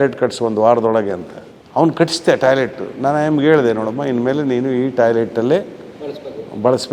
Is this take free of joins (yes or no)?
yes